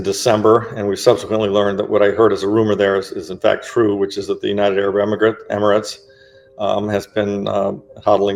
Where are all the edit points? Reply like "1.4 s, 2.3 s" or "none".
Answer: none